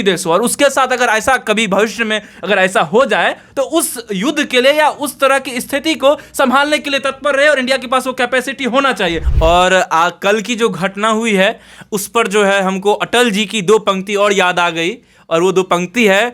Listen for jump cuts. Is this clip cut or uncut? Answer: cut